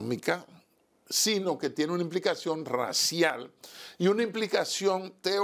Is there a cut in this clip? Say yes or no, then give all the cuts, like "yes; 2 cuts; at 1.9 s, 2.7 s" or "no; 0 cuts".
no; 0 cuts